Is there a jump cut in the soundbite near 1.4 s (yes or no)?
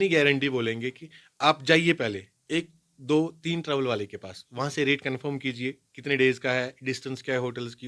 no